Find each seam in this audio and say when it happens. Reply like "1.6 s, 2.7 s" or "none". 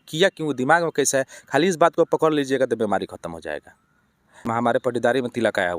4.5 s